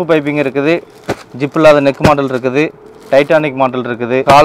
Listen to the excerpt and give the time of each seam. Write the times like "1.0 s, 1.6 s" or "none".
none